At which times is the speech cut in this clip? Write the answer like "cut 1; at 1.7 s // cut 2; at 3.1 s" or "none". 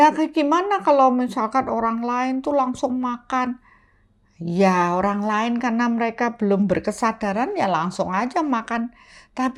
none